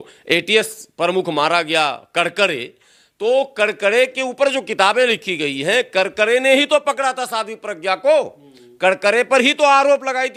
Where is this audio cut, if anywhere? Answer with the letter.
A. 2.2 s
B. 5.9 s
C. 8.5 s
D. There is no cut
D